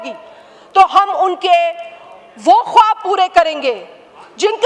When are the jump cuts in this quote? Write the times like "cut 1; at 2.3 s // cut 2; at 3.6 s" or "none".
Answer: none